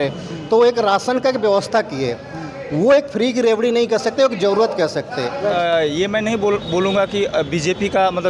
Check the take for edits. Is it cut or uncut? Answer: cut